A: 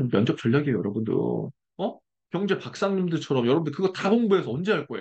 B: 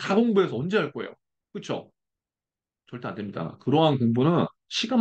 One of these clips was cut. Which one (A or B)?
A